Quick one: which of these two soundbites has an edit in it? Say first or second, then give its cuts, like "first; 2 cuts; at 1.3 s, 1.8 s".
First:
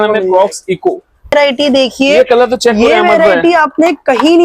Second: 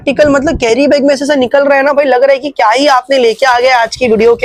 first; 1 cut; at 1.3 s